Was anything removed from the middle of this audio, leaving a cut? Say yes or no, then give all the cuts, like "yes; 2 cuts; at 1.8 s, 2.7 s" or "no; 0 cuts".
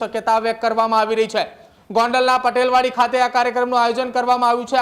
no; 0 cuts